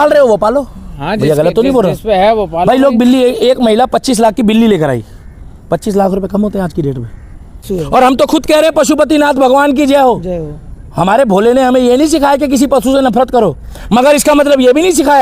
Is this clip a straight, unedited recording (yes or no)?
no